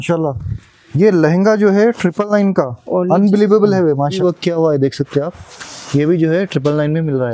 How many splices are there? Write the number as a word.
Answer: one